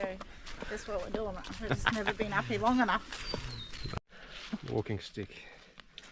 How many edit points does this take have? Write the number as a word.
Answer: one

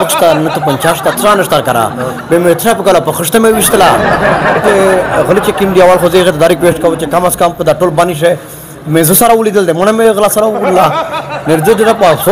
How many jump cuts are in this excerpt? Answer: one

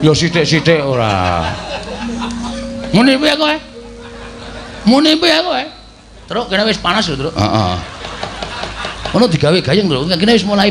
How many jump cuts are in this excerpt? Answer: one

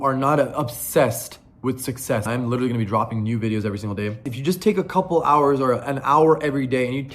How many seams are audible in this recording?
two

